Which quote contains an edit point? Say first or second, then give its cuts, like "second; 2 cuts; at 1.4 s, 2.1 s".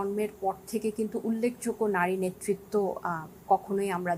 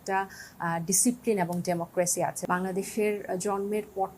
second; 1 cut; at 2.4 s